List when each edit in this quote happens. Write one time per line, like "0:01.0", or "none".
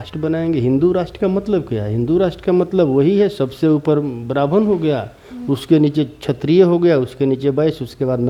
none